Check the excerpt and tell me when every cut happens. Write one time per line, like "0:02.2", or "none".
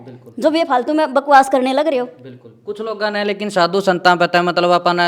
none